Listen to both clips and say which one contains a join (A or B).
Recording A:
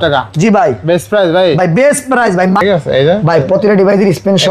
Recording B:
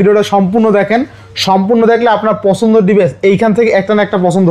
A